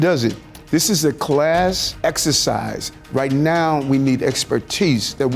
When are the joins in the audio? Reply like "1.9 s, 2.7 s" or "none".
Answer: 1.9 s